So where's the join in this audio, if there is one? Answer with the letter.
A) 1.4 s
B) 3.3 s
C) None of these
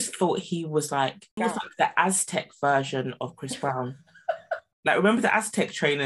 A